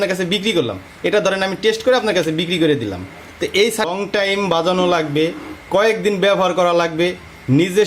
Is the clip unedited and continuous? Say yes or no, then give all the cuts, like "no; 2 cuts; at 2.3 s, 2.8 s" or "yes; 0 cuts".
no; 1 cut; at 3.9 s